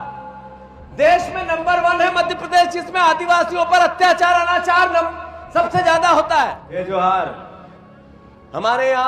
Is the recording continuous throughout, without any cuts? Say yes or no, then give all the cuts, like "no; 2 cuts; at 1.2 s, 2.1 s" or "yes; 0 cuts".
no; 1 cut; at 6.8 s